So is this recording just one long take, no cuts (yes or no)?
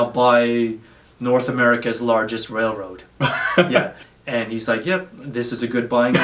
no